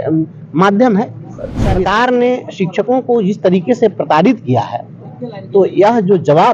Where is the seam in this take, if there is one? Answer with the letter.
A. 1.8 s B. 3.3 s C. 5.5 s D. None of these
A